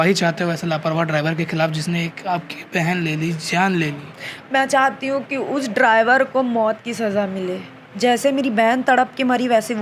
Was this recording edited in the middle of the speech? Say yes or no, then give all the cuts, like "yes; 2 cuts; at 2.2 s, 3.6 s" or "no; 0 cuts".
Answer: no; 0 cuts